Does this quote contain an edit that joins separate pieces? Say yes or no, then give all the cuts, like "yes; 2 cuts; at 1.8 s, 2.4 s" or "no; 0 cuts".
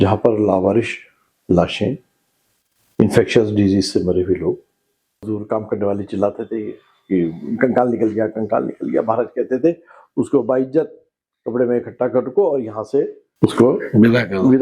yes; 2 cuts; at 5.2 s, 13.2 s